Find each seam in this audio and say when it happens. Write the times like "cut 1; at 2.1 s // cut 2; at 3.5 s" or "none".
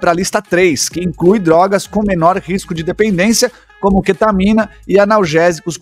none